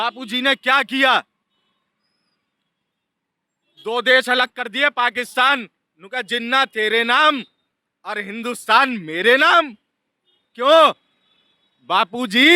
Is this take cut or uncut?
uncut